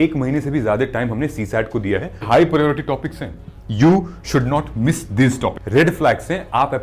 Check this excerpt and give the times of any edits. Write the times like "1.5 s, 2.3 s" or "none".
2.2 s, 5.6 s